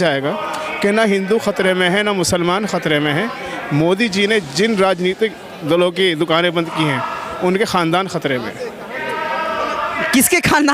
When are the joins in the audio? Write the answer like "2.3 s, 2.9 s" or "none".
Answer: none